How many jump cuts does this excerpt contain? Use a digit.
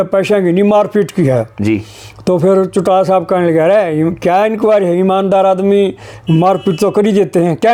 0